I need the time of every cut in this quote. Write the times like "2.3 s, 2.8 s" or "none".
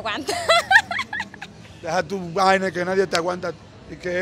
none